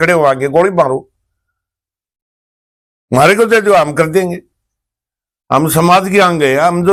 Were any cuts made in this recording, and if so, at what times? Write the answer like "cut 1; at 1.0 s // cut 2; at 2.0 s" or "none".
none